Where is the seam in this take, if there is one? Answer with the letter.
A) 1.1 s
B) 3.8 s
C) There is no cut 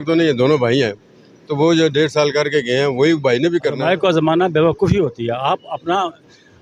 B